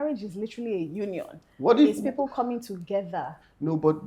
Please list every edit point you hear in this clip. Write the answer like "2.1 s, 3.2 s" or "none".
none